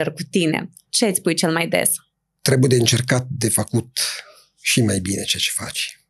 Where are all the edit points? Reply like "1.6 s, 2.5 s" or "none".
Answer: none